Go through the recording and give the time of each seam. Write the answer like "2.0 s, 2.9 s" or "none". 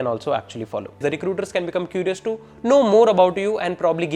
1.0 s

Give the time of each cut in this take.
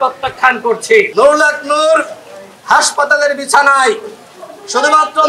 1.1 s

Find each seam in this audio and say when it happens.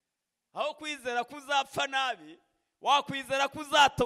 none

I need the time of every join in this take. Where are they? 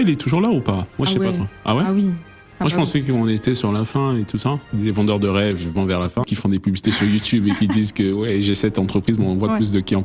4.7 s, 6.2 s

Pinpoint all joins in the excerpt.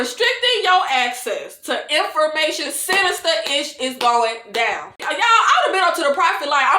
5.0 s

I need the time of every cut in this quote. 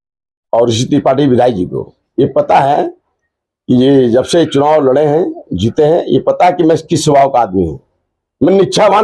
none

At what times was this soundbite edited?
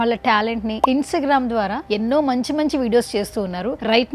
0.8 s, 1.8 s

